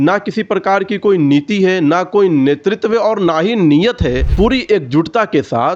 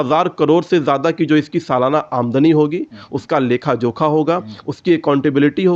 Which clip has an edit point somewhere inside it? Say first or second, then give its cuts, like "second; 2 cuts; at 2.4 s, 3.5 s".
first; 1 cut; at 4.3 s